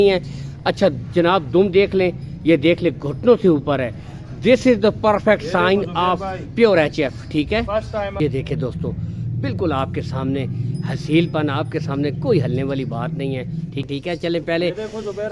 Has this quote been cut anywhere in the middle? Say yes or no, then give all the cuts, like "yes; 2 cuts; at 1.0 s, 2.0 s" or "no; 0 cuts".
yes; 2 cuts; at 8.2 s, 13.9 s